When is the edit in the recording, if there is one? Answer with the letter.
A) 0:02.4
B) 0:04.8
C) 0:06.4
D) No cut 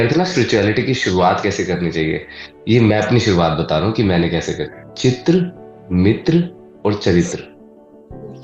B